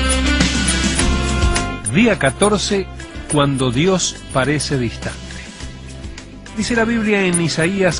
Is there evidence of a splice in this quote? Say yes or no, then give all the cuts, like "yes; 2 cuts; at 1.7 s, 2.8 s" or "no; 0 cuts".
yes; 1 cut; at 3.2 s